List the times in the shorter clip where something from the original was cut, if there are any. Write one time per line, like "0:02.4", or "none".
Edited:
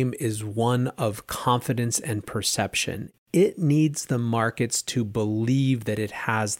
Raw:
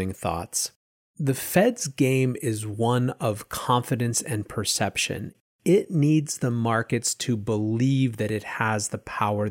0:03.1